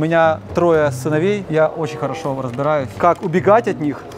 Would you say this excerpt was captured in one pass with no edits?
no; 2 cuts; at 1.4 s, 2.9 s

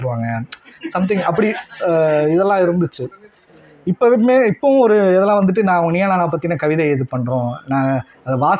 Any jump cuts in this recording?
no; 0 cuts

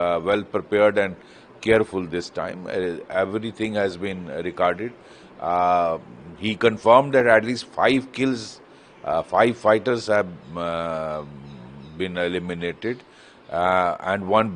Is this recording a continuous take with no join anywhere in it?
yes; 0 cuts

